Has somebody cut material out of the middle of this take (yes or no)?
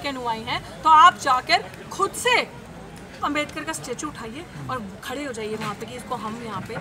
no